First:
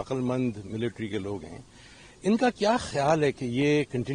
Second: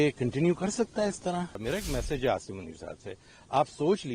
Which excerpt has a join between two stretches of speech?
second; 1 cut; at 1.6 s

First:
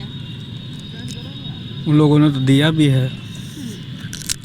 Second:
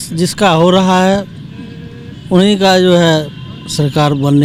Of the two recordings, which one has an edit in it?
first; 1 cut; at 3.2 s

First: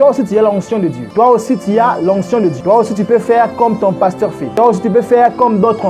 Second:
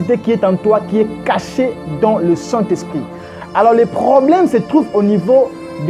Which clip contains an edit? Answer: first; 3 cuts; at 1.0 s, 2.6 s, 4.4 s

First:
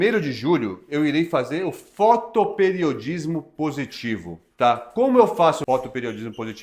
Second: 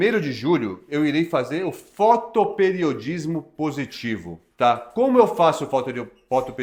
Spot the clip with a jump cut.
first; 1 cut; at 5.6 s

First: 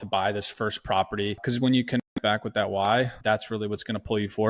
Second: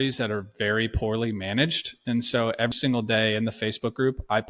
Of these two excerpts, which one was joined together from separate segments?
first; 2 cuts; at 1.4 s, 3.2 s

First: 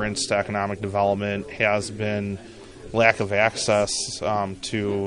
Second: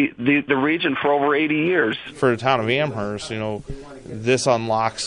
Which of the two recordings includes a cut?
second; 1 cut; at 2.0 s

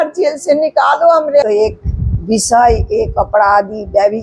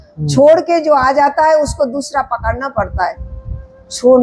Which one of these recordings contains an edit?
first; 1 cut; at 1.4 s

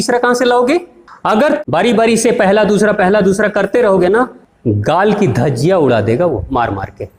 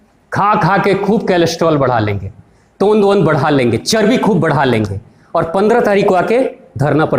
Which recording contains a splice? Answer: first; 2 cuts; at 1.4 s, 4.5 s

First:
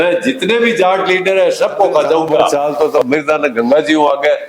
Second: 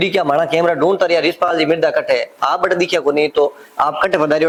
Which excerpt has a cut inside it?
first; 1 cut; at 2.5 s

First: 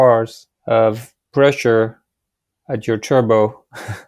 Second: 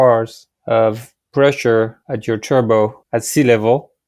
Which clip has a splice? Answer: second; 2 cuts; at 2.1 s, 3.0 s

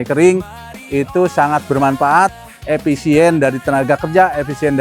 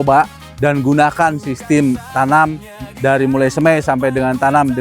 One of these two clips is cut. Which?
second; 1 cut; at 2.1 s

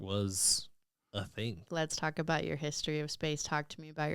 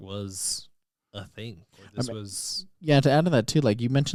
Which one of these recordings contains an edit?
first; 1 cut; at 1.7 s

